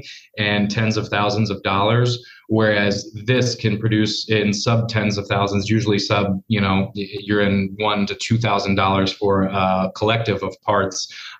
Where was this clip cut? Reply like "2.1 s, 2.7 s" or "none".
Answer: none